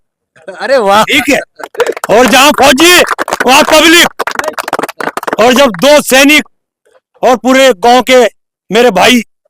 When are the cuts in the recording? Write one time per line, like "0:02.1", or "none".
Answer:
none

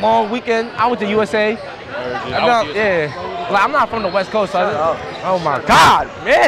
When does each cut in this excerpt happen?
none

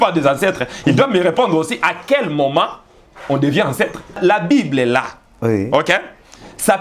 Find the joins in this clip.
0:04.2

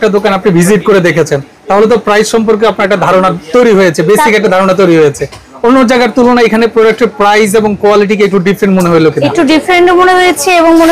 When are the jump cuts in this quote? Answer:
none

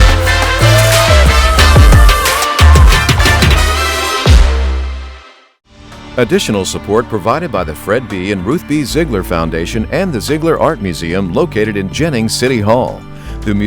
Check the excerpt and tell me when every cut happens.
0:05.9

